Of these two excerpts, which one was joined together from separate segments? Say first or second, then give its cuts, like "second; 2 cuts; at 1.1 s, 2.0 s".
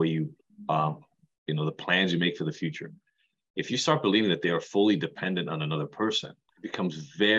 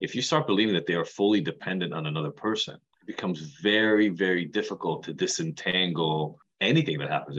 second; 1 cut; at 6.4 s